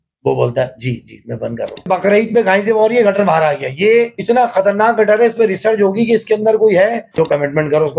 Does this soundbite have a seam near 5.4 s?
no; 2 cuts; at 1.9 s, 7.0 s

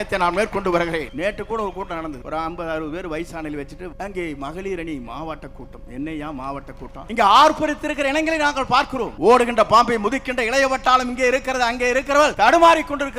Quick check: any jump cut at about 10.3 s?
no; 6 cuts; at 1.1 s, 2.2 s, 3.9 s, 7.0 s, 9.1 s, 12.3 s

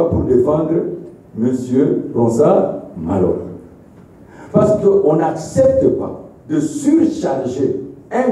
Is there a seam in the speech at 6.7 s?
no; 0 cuts

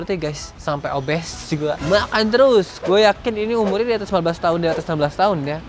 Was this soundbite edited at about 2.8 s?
yes; 1 cut; at 2.8 s

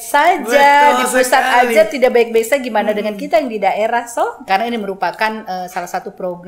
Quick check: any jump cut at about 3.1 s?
no; 1 cut; at 4.5 s

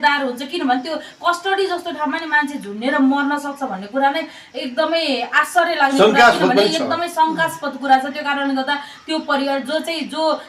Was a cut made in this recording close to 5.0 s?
no; 0 cuts

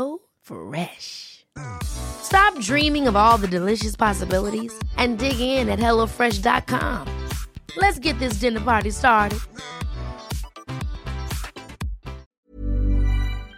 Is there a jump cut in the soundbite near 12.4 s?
yes; 1 cut; at 12.4 s

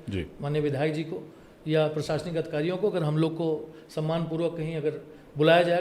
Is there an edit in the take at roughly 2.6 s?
no; 0 cuts

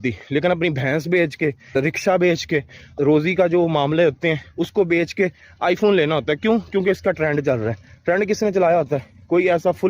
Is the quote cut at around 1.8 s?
yes; 2 cuts; at 1.8 s, 2.9 s

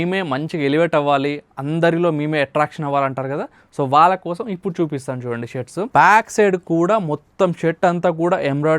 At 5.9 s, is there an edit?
yes; 1 cut; at 5.9 s

